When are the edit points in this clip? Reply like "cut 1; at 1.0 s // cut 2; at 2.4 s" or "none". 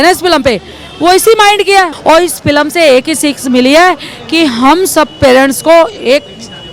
none